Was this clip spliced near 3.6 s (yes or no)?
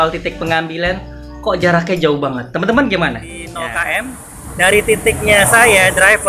yes